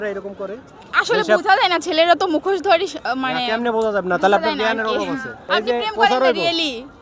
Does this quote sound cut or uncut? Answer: cut